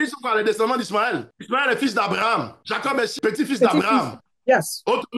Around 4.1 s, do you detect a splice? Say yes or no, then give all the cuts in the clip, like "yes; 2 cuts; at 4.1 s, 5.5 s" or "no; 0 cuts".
no; 2 cuts; at 1.3 s, 2.8 s